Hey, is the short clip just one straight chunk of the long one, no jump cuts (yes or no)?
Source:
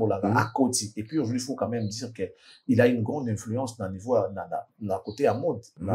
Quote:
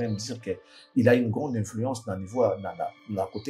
yes